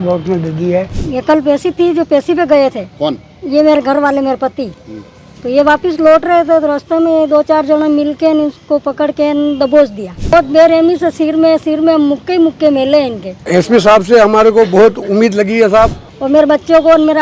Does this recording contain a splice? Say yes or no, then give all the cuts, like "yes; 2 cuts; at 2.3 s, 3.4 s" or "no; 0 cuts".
yes; 4 cuts; at 1.0 s, 10.3 s, 13.5 s, 16.1 s